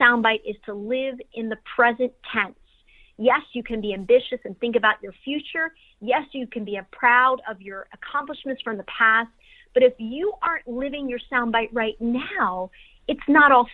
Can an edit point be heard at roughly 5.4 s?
no; 0 cuts

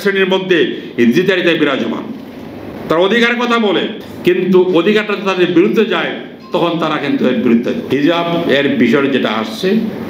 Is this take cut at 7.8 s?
yes; 2 cuts; at 4.0 s, 7.8 s

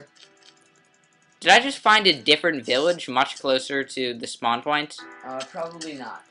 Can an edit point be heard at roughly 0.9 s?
no; 1 cut; at 3.4 s

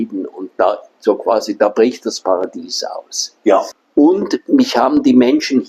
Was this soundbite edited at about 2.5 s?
no; 1 cut; at 3.8 s

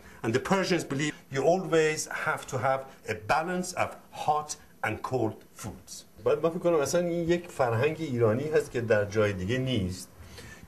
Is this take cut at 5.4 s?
yes; 1 cut; at 5.4 s

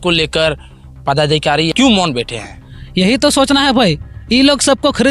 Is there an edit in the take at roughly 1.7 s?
yes; 1 cut; at 1.7 s

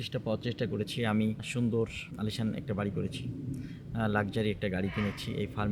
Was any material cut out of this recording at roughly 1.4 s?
yes; 2 cuts; at 1.4 s, 2.1 s

